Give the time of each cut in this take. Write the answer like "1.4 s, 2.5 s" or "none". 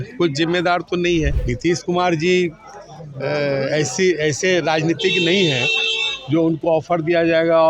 1.4 s